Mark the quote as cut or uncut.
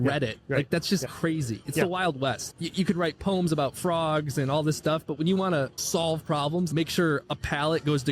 cut